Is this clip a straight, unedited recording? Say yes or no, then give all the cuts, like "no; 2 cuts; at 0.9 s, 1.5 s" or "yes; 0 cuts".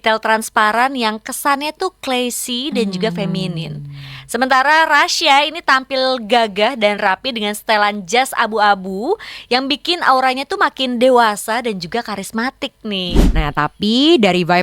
no; 1 cut; at 13.2 s